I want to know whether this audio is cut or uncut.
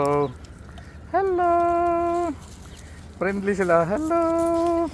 uncut